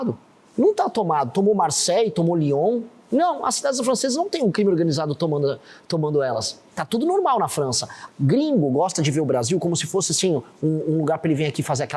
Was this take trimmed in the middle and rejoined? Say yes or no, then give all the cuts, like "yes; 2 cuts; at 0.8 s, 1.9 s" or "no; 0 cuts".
yes; 1 cut; at 8.0 s